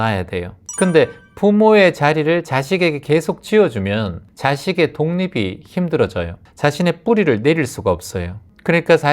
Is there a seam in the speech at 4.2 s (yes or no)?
yes